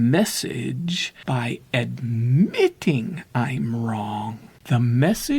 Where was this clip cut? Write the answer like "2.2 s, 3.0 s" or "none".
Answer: 1.2 s, 4.5 s

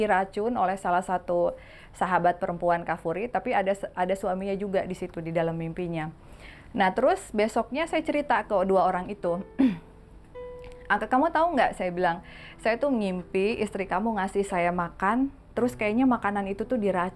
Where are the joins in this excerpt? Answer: none

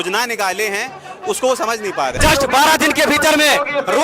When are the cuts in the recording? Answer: 2.2 s

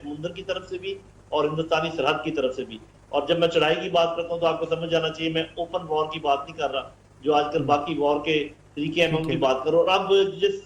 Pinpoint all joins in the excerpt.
none

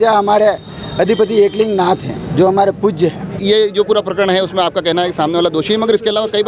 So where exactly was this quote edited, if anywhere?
3.4 s

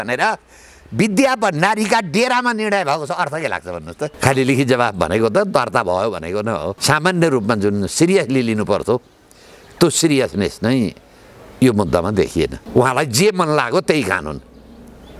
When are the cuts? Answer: 4.1 s, 12.6 s

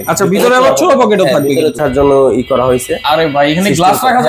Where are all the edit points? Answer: 1.8 s

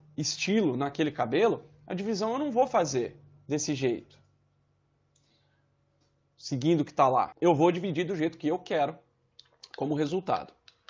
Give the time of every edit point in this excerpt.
7.3 s

